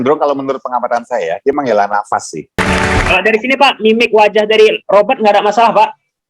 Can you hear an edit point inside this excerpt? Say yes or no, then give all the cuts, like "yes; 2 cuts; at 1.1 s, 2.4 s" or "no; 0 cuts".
yes; 1 cut; at 2.6 s